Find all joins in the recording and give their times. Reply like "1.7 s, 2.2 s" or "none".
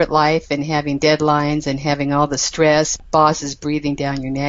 2.9 s